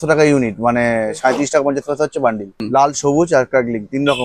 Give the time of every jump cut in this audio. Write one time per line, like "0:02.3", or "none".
0:02.6